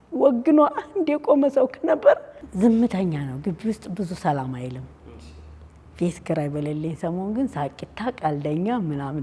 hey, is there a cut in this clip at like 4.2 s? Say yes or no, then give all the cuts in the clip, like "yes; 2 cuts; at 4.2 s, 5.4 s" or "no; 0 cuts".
no; 1 cut; at 2.4 s